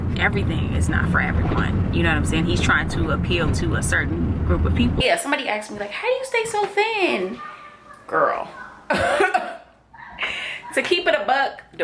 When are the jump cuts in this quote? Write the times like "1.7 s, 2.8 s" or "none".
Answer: 5.0 s